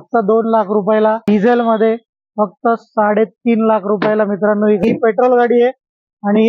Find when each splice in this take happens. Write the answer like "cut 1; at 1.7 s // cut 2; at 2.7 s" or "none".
cut 1; at 1.3 s // cut 2; at 4.8 s